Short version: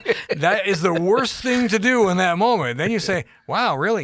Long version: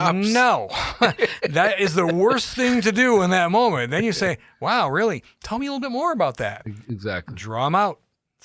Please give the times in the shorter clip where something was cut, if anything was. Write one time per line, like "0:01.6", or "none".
none